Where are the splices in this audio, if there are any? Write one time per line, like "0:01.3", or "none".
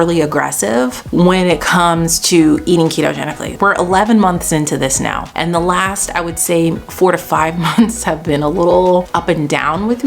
0:01.0
0:03.5
0:05.3
0:09.1